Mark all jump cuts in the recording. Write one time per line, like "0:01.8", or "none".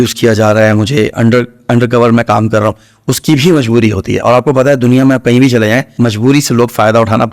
0:05.9